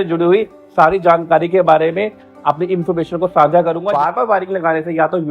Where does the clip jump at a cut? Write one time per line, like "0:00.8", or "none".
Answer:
0:04.0